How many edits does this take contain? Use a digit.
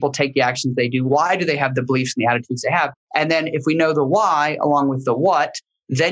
1